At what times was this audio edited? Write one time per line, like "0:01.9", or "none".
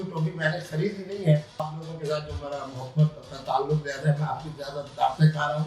0:01.7